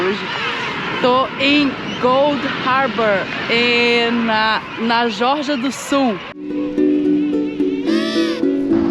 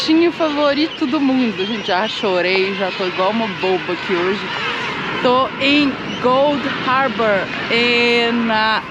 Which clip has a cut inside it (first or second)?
first